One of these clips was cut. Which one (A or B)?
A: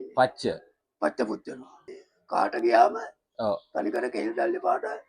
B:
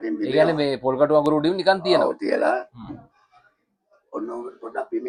A